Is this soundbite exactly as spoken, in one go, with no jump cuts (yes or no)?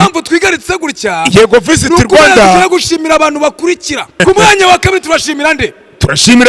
no